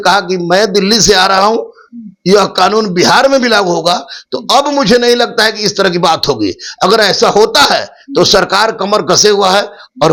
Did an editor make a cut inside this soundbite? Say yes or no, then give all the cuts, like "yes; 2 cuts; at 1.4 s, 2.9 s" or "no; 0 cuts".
no; 0 cuts